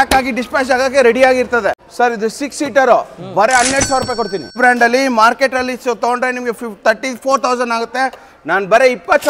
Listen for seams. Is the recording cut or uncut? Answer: cut